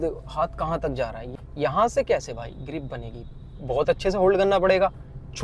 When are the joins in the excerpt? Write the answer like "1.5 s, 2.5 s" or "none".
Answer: 1.2 s